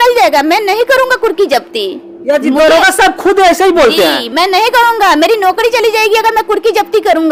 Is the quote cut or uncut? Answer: uncut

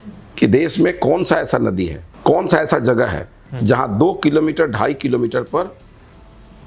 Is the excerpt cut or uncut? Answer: cut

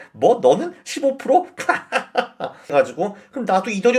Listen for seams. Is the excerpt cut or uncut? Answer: cut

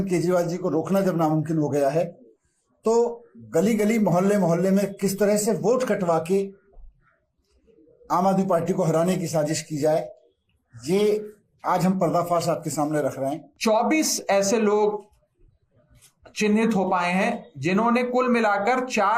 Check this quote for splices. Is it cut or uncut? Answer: cut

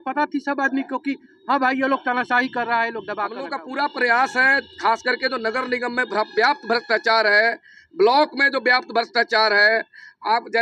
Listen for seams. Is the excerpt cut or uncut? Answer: cut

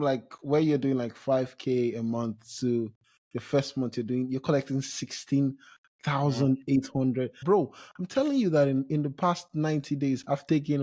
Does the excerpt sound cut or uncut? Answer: cut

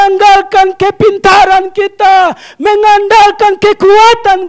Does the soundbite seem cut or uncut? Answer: uncut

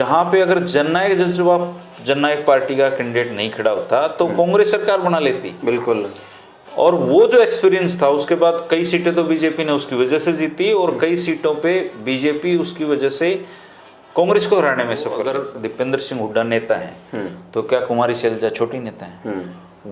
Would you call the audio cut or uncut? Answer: cut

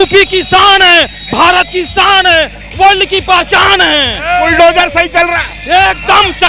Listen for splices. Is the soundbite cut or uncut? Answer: uncut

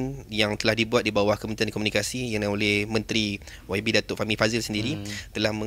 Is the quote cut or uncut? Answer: uncut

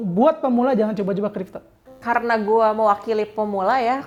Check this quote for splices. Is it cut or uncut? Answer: uncut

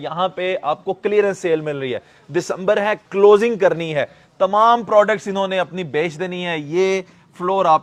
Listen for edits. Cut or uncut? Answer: uncut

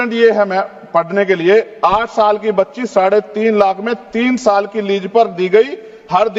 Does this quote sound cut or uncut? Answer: uncut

